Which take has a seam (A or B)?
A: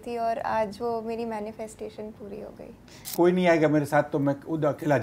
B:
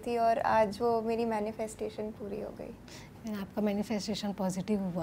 A